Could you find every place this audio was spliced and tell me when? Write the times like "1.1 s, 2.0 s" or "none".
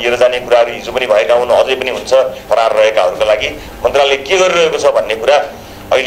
2.4 s